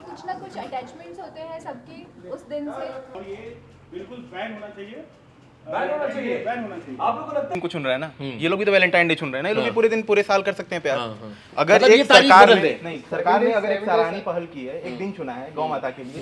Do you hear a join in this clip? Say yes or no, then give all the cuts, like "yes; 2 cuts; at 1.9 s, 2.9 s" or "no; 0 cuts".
yes; 2 cuts; at 3.2 s, 7.5 s